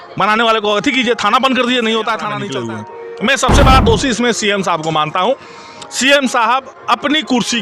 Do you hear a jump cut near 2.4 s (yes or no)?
yes